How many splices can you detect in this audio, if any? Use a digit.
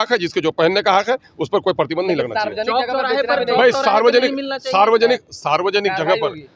0